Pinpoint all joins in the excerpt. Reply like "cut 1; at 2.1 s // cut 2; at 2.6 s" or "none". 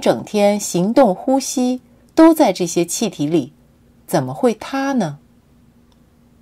cut 1; at 2.4 s

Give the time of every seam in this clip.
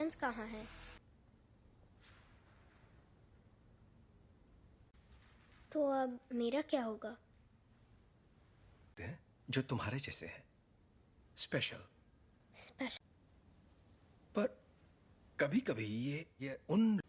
cut 1; at 1.0 s

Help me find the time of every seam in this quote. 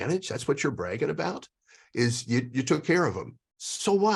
none

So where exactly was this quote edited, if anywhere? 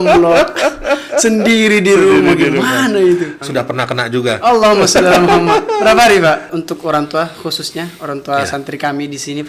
cut 1; at 3.4 s // cut 2; at 6.6 s

